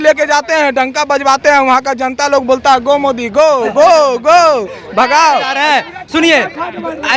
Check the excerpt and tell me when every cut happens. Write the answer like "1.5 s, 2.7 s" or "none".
5.6 s